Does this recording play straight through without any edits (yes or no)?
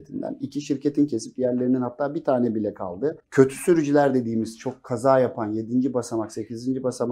no